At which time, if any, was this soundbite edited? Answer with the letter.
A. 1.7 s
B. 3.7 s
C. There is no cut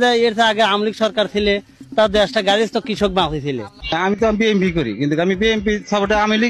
B